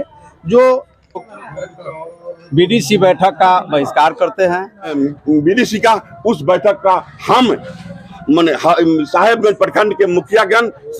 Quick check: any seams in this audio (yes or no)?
yes